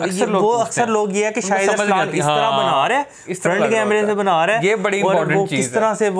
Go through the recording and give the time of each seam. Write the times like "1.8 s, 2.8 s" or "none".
none